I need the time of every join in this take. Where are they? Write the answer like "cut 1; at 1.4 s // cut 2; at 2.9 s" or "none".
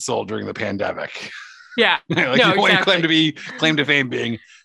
none

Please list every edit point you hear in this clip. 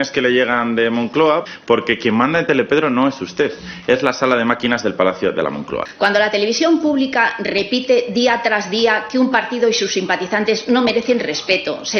cut 1; at 1.5 s // cut 2; at 5.6 s

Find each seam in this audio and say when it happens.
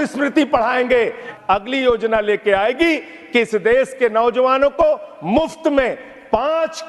cut 1; at 1.3 s

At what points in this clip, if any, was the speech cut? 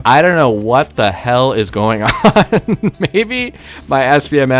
none

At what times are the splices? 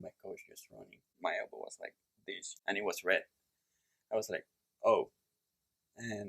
cut 1; at 1.1 s // cut 2; at 2.5 s

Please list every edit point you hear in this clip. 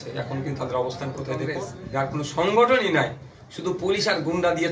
cut 1; at 1.7 s

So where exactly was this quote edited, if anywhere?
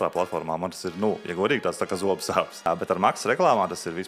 cut 1; at 2.7 s

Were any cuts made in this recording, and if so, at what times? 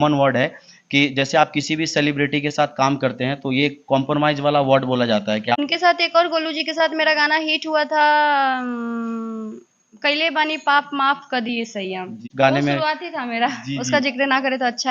cut 1; at 5.6 s // cut 2; at 12.2 s

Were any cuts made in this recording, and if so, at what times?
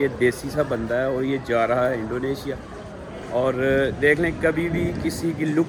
none

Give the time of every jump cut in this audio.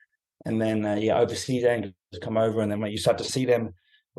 cut 1; at 2.1 s // cut 2; at 3.3 s

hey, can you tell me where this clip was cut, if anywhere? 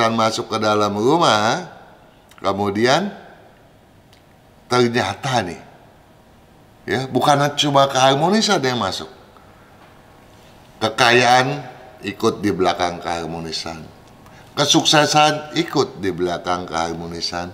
none

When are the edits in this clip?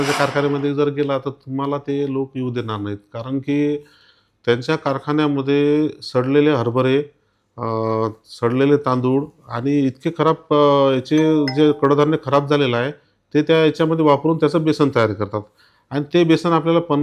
none

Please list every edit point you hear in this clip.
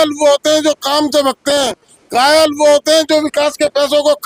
none

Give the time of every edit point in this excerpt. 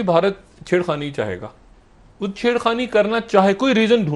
none

